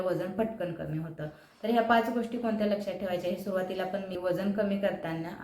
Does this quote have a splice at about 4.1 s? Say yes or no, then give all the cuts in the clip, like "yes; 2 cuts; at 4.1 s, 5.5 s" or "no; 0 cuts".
yes; 1 cut; at 4.1 s